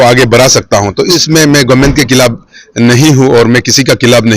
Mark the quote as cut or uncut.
cut